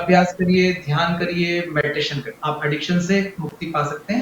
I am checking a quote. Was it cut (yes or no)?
yes